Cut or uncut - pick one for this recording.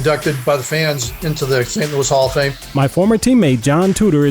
cut